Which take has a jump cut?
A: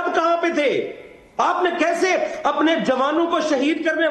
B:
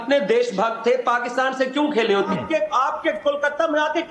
B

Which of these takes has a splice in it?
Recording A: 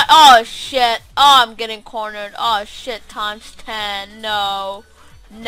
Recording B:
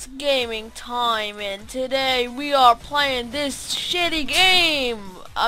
A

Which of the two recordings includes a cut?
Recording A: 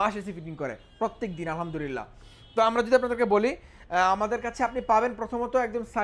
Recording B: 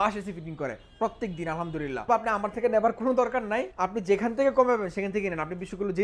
B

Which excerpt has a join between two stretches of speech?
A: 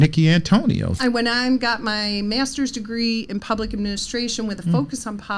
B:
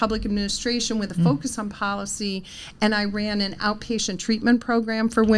A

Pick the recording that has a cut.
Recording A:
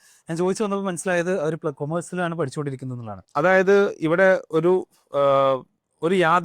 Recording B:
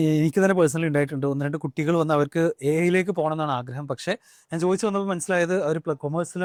A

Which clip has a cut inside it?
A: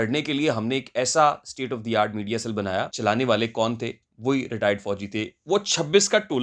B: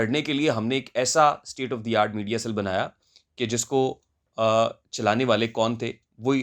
A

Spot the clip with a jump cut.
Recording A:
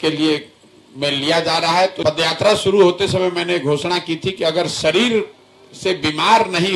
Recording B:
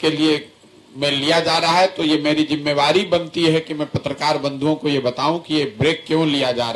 A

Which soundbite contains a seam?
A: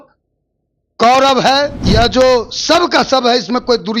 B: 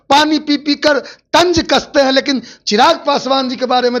A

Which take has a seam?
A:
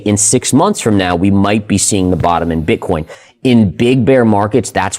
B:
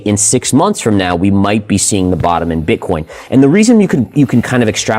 A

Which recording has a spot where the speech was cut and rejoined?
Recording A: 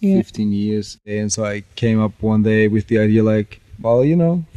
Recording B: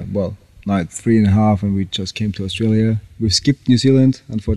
A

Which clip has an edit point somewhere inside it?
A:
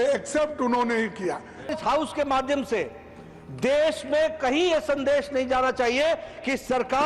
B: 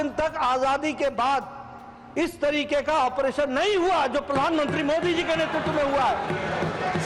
A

